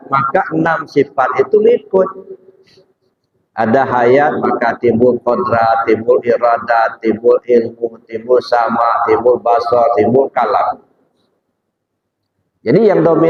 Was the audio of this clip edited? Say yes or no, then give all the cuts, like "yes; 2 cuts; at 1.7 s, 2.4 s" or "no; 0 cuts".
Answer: no; 0 cuts